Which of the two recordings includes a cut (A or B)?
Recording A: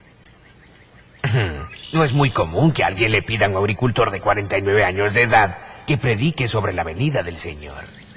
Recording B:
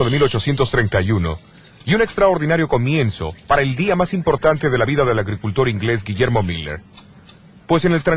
B